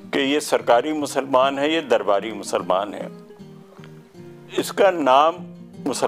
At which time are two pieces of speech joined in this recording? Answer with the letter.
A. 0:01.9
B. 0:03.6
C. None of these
C